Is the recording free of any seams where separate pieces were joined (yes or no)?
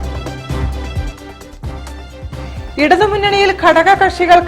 no